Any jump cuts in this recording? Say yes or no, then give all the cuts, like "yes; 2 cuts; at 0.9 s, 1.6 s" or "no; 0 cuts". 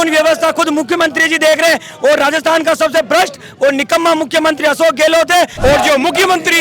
yes; 1 cut; at 5.5 s